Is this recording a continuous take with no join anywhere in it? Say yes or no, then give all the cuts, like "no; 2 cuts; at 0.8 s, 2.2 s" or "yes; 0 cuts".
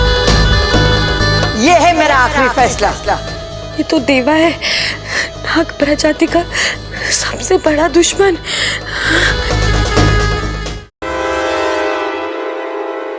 no; 1 cut; at 11.0 s